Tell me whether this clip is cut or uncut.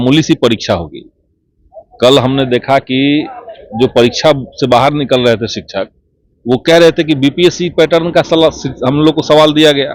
uncut